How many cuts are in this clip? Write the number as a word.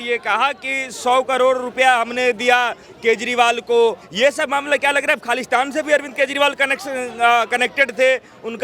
one